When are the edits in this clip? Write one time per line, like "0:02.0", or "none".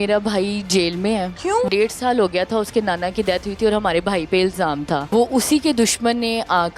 0:01.7
0:05.1